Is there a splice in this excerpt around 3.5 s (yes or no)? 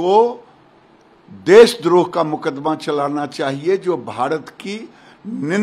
no